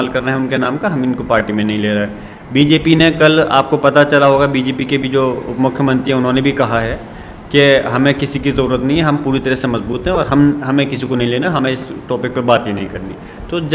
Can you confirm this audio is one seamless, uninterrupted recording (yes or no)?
yes